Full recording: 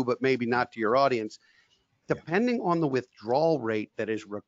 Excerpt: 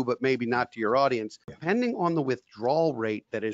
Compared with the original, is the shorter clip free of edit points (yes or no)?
no